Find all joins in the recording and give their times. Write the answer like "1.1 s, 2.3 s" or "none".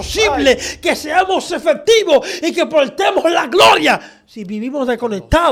none

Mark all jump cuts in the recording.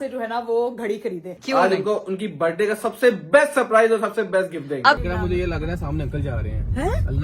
1.3 s, 5.0 s

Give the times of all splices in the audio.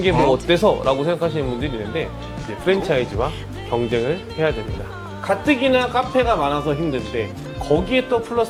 none

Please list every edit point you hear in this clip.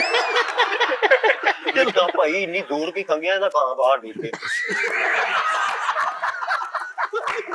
none

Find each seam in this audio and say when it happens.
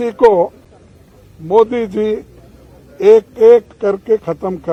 none

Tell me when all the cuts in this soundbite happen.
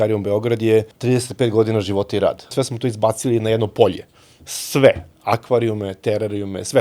0.9 s, 2.5 s

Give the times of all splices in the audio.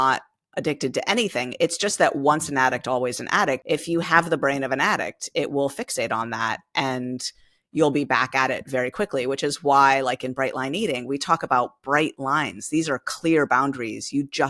3.6 s

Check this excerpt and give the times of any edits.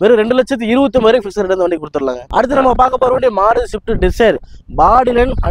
2.2 s

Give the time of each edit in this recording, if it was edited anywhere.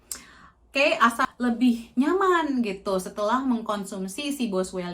1.2 s

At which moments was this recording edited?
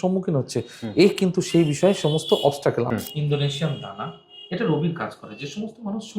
2.9 s

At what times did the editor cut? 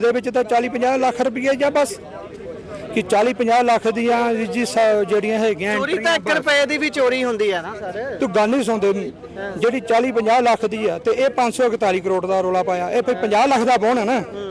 none

